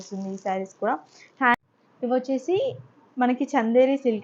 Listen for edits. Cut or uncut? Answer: cut